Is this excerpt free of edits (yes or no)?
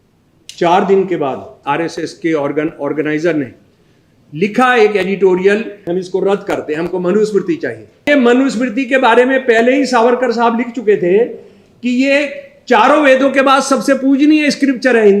no